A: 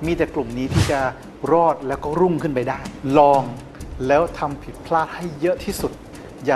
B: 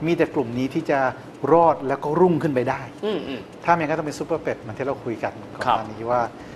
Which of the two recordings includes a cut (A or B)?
A